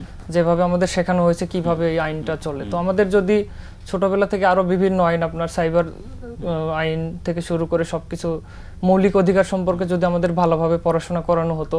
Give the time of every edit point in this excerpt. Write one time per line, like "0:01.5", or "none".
none